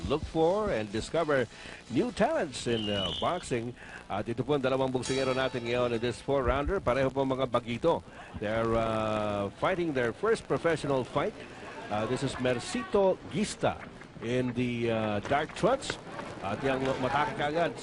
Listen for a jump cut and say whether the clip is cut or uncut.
uncut